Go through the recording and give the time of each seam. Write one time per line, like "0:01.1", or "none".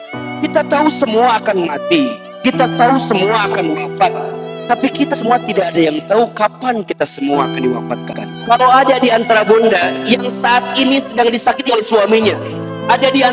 0:08.0